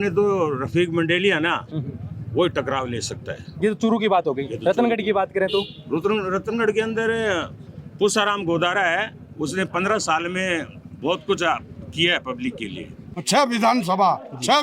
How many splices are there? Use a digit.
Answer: 1